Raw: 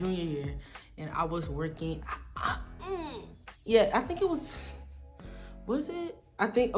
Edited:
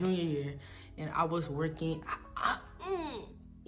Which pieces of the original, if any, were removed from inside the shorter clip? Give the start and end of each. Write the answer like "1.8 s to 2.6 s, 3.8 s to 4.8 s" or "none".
none